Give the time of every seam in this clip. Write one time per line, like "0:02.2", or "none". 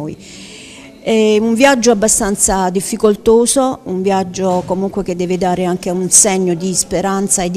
0:05.3